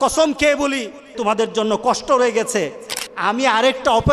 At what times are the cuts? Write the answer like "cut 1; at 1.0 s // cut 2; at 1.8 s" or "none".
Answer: cut 1; at 1.2 s